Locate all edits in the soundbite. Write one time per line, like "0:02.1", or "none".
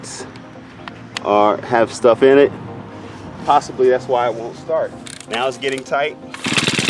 0:05.1